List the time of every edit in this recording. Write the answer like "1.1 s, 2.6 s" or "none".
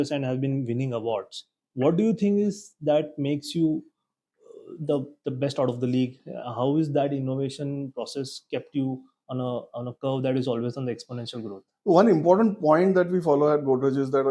none